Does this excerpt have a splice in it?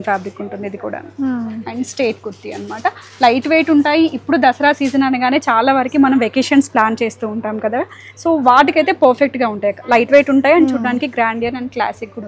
no; 0 cuts

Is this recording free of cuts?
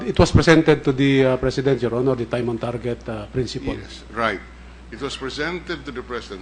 yes; 0 cuts

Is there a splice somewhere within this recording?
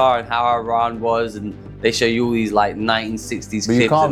no; 0 cuts

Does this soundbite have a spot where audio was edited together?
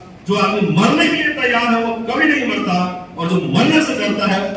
no; 0 cuts

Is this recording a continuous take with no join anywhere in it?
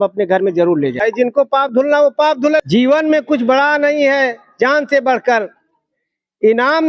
no; 2 cuts; at 1.0 s, 2.6 s

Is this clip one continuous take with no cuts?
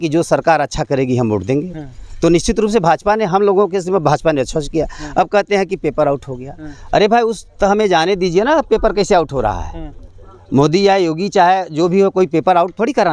yes; 0 cuts

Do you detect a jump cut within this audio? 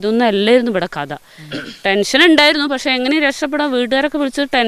no; 0 cuts

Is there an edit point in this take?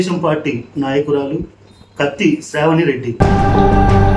yes; 1 cut; at 3.2 s

